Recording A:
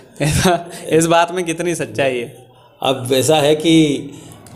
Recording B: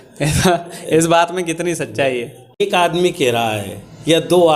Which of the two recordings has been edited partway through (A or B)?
B